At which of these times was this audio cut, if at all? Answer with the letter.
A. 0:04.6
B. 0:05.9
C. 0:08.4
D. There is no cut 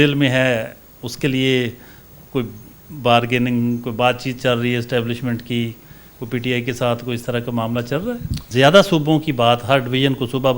C